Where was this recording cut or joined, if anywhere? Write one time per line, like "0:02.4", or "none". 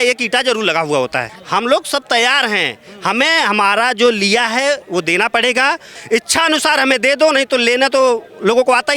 0:01.3
0:05.9

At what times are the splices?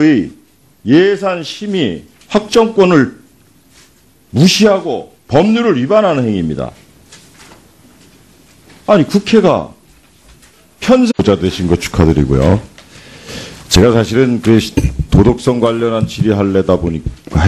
none

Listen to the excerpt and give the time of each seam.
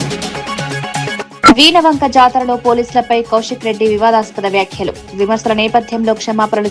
0:01.3

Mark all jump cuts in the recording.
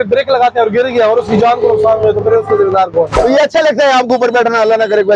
0:03.1

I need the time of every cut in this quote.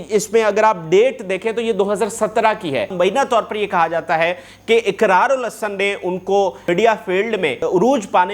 0:02.9
0:06.6
0:07.6

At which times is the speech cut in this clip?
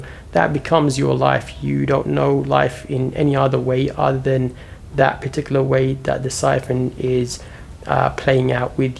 none

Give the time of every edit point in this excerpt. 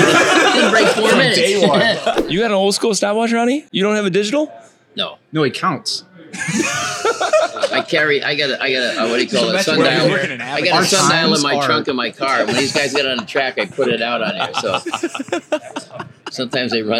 0:02.2

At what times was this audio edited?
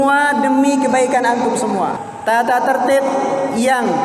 0:02.0

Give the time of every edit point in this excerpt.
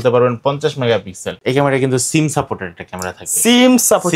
0:01.3

